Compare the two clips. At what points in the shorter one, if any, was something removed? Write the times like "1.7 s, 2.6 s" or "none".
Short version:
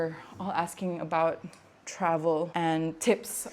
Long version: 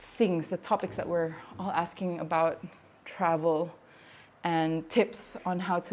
2.5 s